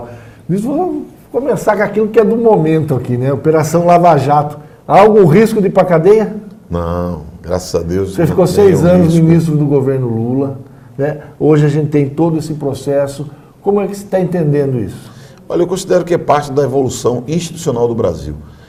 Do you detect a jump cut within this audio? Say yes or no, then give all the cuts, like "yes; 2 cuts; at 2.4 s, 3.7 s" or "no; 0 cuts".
no; 0 cuts